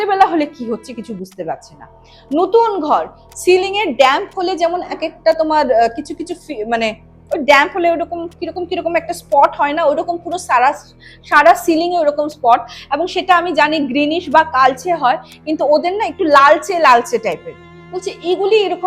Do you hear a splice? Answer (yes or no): no